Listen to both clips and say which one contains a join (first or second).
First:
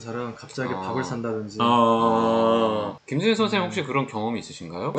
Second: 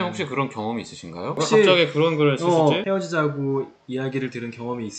second